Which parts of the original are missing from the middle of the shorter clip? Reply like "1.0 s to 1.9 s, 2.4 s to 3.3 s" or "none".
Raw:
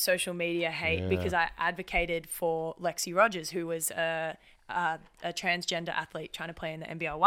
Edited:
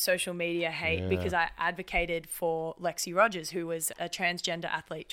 3.9 s to 5.1 s

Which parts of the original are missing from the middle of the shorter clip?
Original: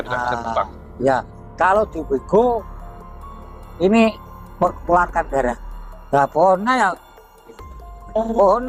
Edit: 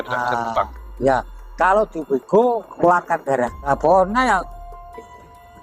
2.7 s to 4.8 s, 5.7 s to 6.2 s

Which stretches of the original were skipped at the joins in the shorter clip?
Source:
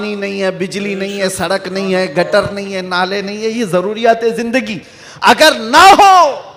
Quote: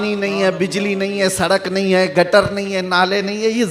none

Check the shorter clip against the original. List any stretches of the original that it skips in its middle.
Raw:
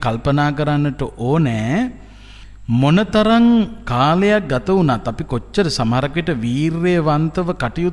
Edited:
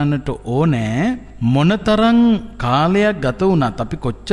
2.0 s to 2.6 s

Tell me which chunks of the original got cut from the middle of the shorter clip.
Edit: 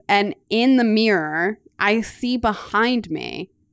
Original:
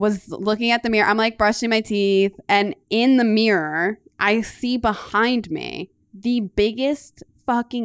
none

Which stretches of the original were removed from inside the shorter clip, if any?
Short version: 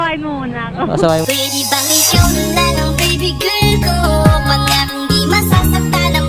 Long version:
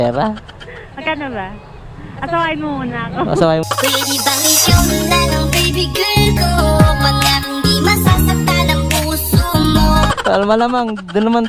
3.6 s to 3.8 s

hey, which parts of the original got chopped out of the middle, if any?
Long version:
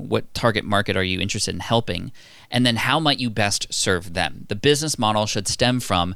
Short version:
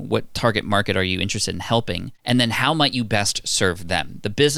2.1 s to 2.4 s

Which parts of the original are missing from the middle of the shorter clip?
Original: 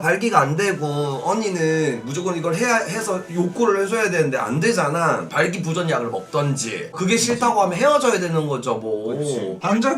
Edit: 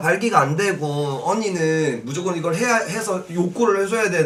none

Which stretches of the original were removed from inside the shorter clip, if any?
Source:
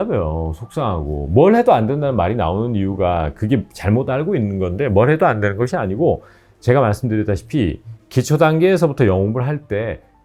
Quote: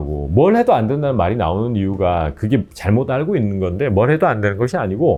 none

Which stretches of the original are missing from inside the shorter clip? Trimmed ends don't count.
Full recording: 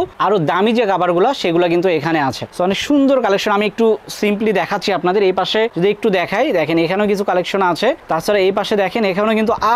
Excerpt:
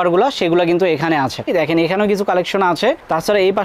2.5 s to 6.5 s

